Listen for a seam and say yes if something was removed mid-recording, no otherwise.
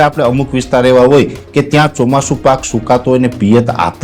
no